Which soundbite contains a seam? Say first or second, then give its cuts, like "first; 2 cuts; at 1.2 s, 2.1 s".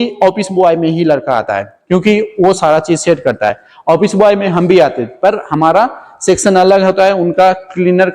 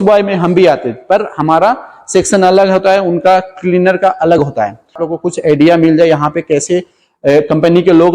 second; 1 cut; at 5.1 s